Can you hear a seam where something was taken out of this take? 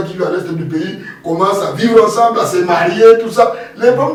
no; 0 cuts

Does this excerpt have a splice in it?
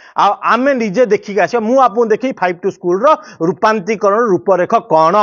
no; 0 cuts

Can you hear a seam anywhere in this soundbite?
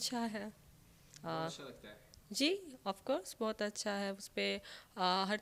no; 0 cuts

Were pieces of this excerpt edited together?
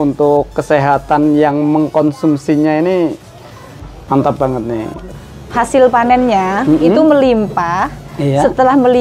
yes; 1 cut; at 5.1 s

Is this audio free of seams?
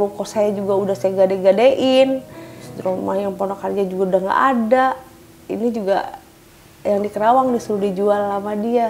no; 1 cut; at 2.7 s

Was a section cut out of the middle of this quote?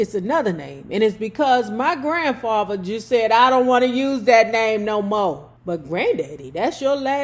yes; 1 cut; at 5.5 s

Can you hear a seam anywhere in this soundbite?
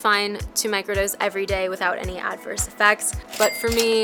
no; 0 cuts

